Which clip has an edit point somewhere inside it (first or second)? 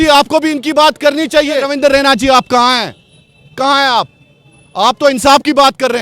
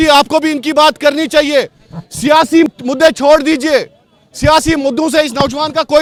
first